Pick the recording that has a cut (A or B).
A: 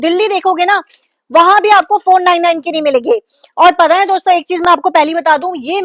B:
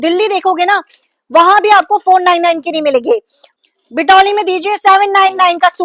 B